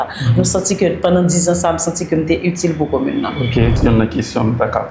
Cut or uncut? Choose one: cut